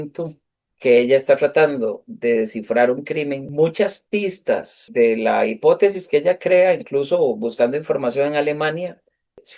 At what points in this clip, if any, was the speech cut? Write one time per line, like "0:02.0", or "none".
0:03.5
0:04.9